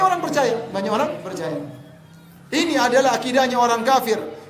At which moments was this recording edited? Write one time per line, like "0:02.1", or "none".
none

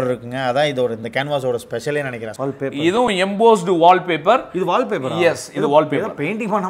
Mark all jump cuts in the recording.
0:02.3

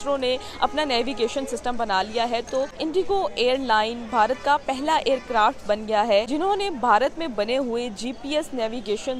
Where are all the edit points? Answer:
none

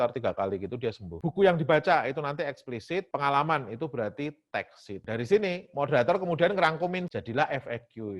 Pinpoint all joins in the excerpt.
0:01.2
0:05.0
0:07.1

